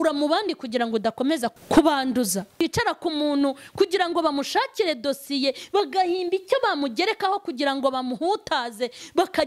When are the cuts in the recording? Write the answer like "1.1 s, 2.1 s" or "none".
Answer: 1.5 s, 2.6 s